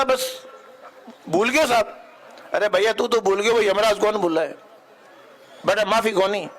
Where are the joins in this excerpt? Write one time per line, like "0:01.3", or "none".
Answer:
none